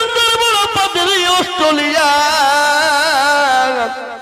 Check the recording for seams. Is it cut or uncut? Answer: uncut